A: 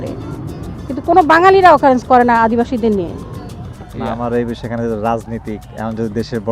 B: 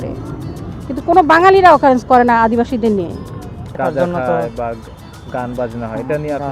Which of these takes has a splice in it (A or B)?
B